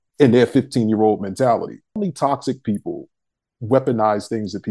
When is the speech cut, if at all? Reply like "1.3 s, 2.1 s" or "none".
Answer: 2.0 s